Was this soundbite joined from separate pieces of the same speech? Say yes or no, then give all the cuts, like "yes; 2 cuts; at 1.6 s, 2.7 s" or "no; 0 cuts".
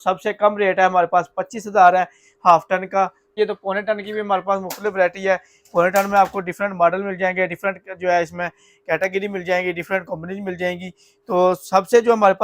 yes; 1 cut; at 3.3 s